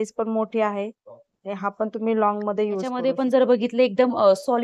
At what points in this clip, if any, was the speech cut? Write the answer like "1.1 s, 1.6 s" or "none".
3.0 s